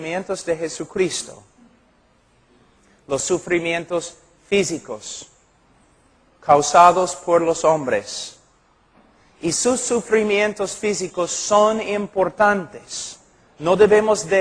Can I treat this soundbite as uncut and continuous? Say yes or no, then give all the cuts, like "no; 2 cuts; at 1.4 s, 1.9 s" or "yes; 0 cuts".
no; 1 cut; at 6.9 s